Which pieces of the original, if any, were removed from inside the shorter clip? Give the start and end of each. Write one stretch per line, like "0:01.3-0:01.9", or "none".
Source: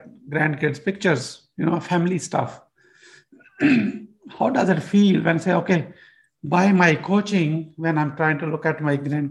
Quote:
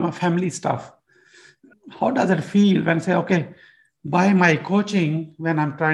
0:03.4-0:04.1

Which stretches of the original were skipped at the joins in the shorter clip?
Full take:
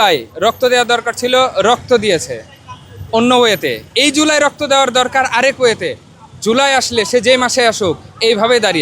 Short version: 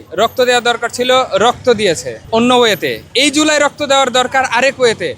0:02.4-0:02.9

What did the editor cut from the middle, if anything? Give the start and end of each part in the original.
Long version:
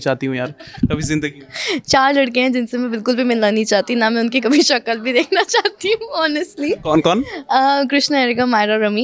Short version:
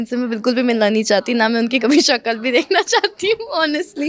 none

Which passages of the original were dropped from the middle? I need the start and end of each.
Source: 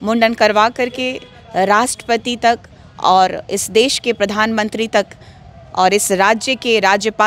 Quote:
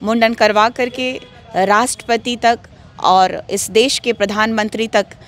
none

